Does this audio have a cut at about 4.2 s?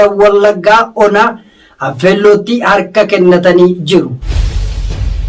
yes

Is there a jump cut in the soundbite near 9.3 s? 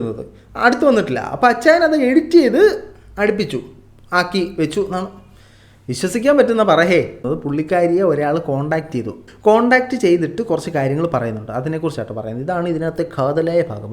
yes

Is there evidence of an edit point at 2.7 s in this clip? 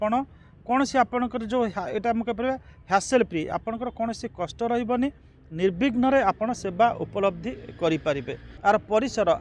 no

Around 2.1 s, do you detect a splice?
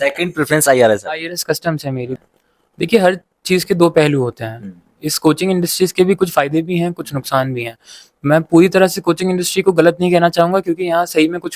yes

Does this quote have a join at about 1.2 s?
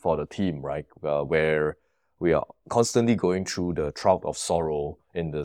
no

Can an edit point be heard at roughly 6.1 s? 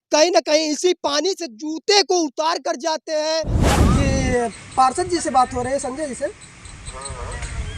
no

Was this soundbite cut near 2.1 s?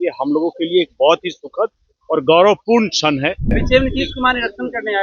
no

